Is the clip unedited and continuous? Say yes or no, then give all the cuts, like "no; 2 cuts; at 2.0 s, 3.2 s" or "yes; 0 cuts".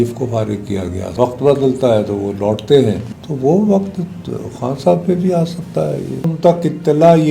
no; 3 cuts; at 1.1 s, 3.1 s, 6.3 s